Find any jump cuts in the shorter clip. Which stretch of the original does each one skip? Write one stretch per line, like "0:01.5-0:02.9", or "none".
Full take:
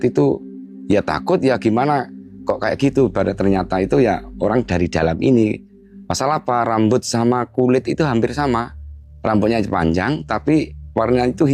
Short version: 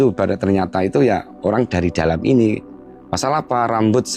none

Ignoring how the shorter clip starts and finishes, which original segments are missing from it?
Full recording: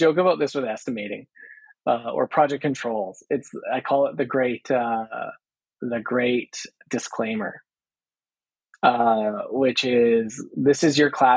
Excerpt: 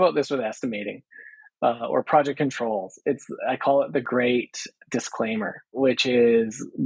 0:04.3-0:06.0
0:07.7-0:09.4

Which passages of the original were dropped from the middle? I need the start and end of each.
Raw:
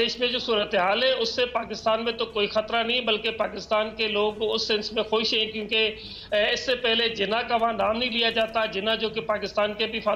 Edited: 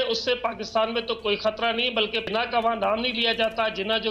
0:03.4-0:07.2

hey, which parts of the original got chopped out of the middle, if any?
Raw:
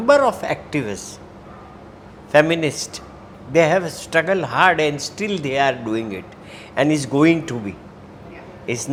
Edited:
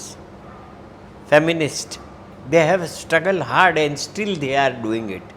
none

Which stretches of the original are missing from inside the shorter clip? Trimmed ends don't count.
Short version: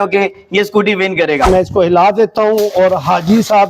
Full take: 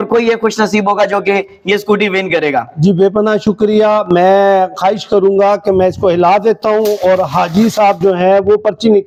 0:02.6-0:05.7

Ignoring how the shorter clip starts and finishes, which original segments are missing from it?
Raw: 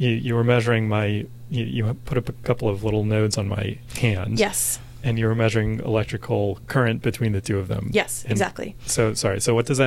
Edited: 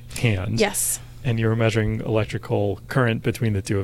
none

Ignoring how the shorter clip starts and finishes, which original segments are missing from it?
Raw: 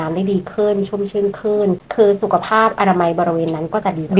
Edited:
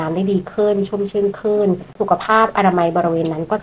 0:01.9-0:02.2

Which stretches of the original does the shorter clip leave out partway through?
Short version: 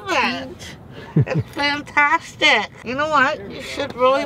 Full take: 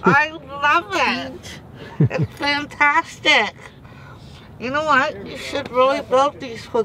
0:03.6-0:04.5

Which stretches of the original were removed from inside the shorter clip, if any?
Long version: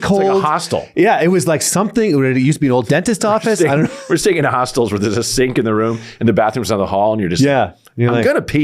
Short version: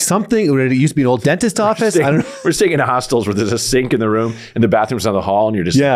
none

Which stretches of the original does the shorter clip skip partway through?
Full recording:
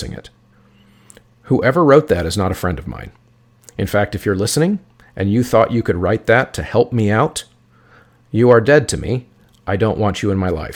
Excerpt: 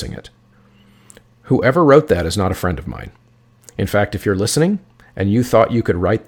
none

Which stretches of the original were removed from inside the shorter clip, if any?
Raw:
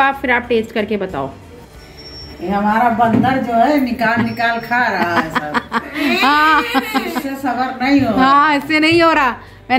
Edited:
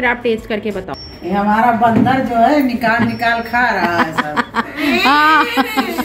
0:01.3-0:02.2

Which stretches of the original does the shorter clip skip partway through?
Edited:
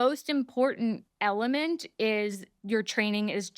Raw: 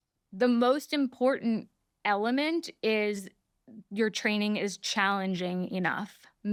0:01.7-0:01.9
0:03.3-0:03.8

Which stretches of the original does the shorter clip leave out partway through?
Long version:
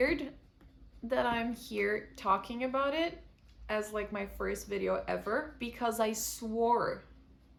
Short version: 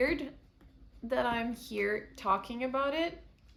none

